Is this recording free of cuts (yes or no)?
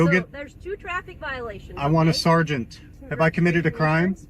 no